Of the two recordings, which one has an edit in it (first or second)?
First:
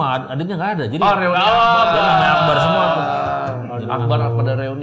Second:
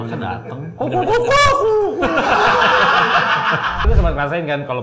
second